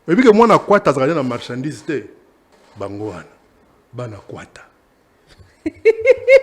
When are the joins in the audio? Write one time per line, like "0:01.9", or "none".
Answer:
0:02.6